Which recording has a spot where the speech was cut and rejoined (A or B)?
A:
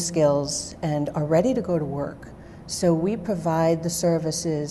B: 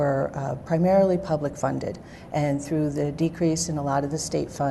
A